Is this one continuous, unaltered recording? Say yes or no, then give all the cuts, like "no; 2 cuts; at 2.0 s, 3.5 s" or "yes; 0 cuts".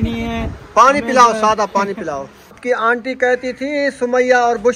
no; 1 cut; at 2.6 s